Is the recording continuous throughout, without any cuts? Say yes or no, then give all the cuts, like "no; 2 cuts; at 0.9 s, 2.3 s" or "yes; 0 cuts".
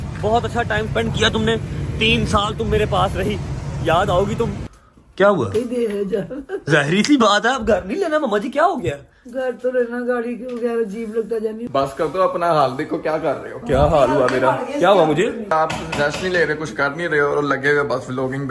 no; 3 cuts; at 4.7 s, 11.6 s, 15.5 s